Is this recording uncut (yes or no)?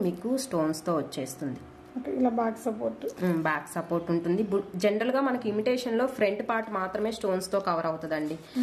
yes